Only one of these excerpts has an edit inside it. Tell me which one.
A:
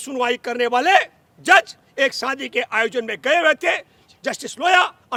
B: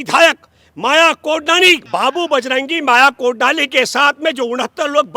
B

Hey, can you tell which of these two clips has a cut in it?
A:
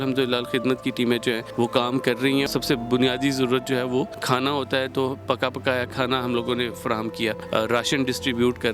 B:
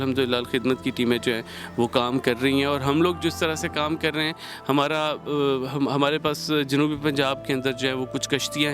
A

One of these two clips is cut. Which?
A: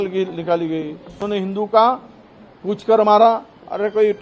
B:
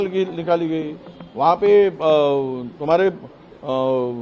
A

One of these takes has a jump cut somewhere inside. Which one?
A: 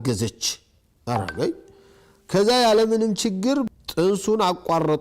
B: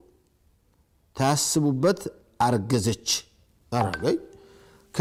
A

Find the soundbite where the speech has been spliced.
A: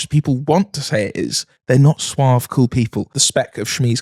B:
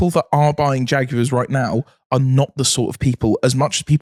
A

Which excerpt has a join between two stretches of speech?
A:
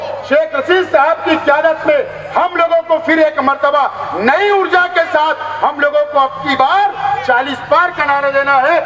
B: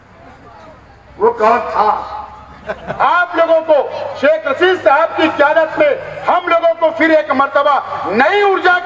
B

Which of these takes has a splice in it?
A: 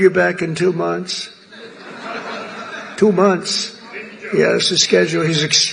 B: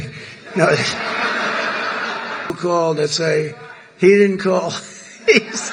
B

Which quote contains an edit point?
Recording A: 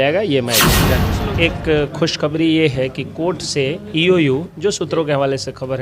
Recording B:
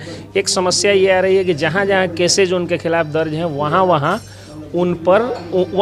A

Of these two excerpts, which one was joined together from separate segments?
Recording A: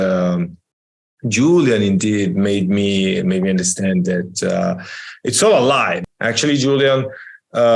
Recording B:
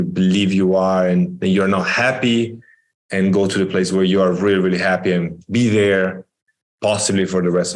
A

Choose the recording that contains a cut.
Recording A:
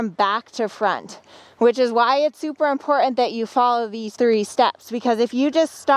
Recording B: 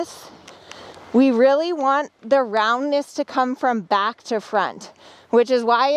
A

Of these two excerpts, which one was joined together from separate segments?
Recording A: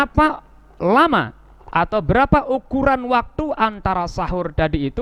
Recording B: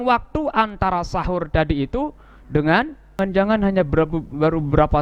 B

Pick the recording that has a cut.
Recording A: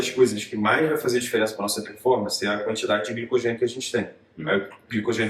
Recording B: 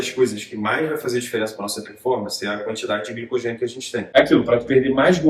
B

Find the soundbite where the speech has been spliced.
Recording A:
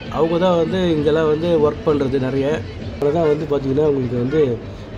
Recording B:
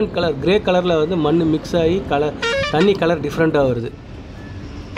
A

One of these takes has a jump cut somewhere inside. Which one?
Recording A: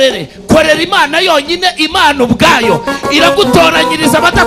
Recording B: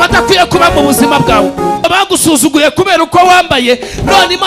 B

